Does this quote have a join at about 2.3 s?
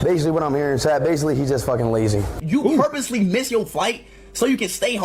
yes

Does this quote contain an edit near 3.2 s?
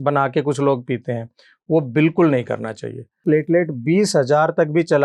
yes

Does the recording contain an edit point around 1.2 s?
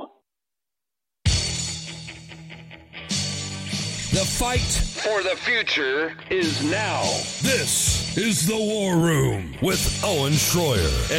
yes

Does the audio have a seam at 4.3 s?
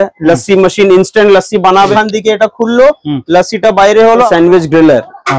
yes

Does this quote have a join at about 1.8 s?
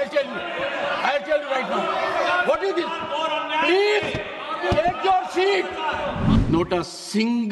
no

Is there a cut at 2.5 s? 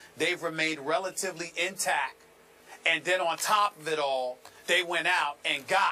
yes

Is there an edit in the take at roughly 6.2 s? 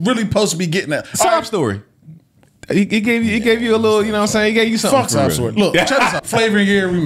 yes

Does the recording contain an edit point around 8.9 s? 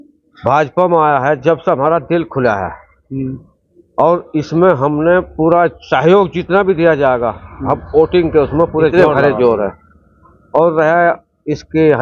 yes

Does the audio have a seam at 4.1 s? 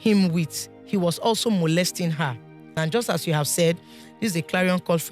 no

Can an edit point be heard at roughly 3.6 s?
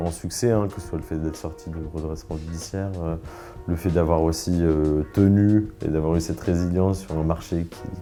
no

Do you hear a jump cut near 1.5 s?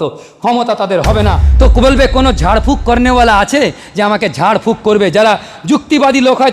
yes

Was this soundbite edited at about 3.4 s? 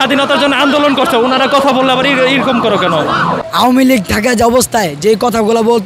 yes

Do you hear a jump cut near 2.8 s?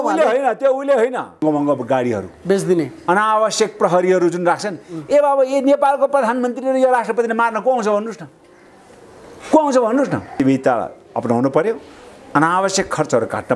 no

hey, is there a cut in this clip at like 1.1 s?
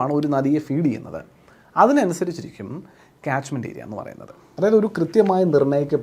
no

